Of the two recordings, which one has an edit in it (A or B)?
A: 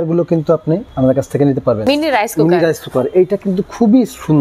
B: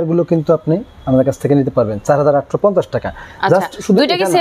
A